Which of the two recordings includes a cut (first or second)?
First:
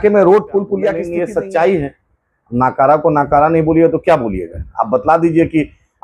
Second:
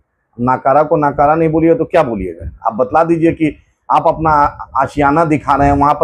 first